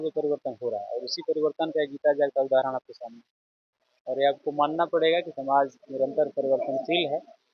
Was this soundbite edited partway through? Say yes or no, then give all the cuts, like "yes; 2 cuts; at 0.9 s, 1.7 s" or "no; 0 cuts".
no; 0 cuts